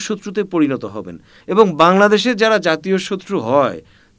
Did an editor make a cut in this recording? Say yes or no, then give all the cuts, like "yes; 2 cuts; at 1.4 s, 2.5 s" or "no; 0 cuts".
yes; 1 cut; at 1.3 s